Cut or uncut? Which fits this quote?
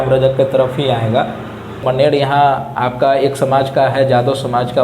cut